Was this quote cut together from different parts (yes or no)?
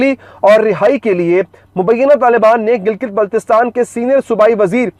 no